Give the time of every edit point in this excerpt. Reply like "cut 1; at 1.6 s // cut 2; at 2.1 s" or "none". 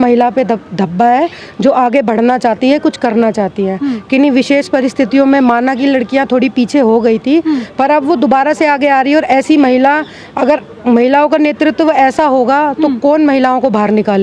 none